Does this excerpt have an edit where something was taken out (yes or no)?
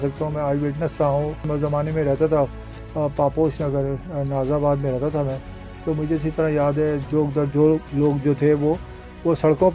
yes